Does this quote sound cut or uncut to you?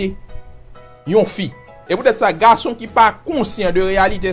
cut